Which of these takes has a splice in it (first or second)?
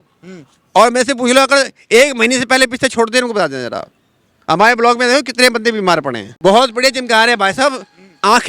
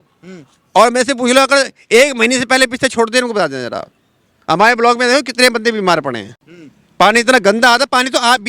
first